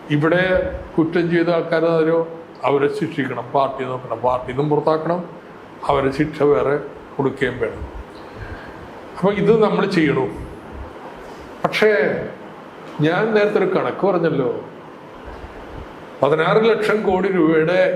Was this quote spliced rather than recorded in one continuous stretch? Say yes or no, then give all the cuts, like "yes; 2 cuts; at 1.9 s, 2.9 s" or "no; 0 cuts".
no; 0 cuts